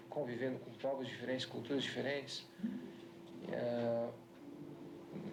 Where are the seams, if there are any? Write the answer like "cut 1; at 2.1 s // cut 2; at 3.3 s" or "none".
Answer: none